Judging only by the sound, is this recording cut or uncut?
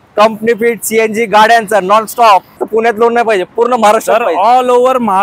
cut